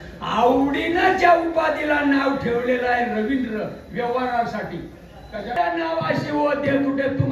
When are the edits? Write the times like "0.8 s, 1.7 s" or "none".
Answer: 5.6 s